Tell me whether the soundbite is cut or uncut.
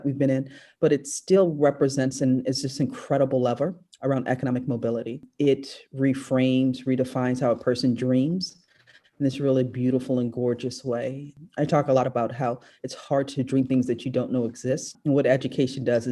cut